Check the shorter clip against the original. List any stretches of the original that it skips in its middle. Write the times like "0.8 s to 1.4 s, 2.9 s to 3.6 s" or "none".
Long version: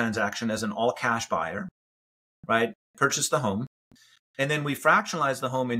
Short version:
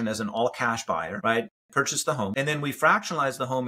1.6 s to 2.4 s, 3.6 s to 4.3 s